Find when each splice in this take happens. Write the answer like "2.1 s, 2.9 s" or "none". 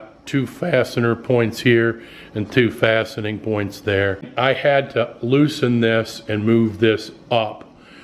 4.3 s

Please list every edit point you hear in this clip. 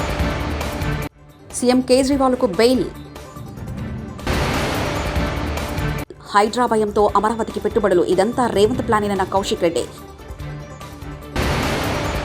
1.1 s

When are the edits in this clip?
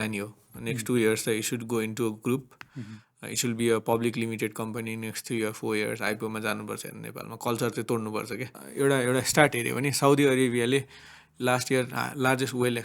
8.5 s

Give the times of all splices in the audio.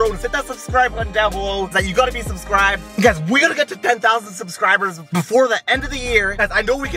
none

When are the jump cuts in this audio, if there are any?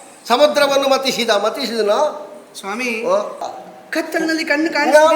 3.5 s

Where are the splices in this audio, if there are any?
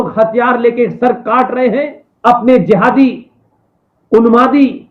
2.0 s

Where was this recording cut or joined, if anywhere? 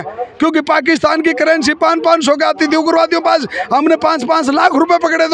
none

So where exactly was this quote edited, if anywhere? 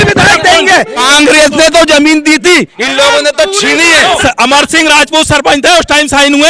1.0 s, 4.2 s

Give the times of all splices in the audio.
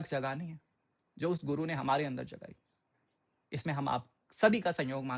none

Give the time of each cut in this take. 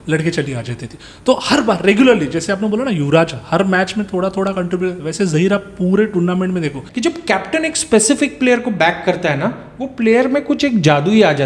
6.8 s

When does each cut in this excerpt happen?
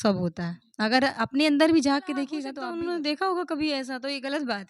2.4 s

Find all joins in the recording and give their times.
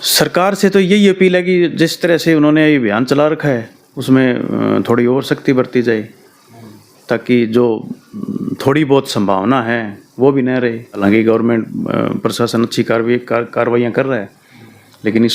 11.0 s

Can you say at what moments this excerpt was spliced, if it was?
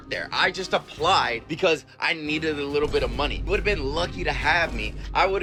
none

